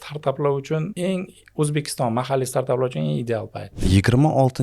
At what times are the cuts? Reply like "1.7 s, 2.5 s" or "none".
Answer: 0.9 s, 3.7 s